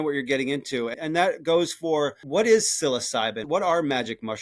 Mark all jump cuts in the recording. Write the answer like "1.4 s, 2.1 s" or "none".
0.9 s, 2.2 s, 3.4 s